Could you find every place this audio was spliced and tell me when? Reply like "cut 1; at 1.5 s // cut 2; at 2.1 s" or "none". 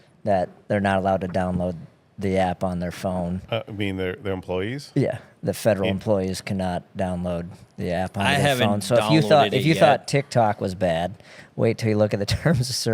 none